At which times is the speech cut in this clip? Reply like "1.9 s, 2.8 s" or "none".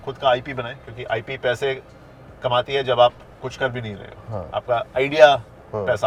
none